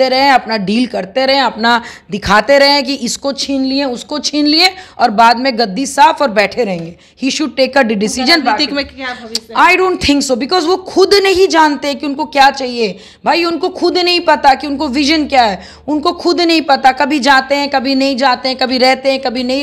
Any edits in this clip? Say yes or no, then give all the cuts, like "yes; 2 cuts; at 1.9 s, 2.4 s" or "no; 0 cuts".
no; 0 cuts